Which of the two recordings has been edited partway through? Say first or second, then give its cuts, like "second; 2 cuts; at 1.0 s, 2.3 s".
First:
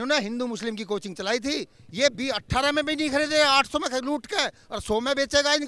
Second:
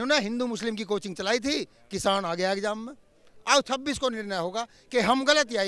first; 1 cut; at 1.8 s